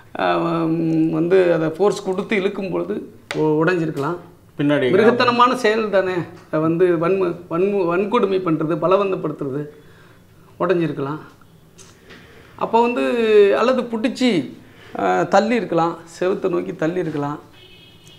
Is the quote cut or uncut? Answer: uncut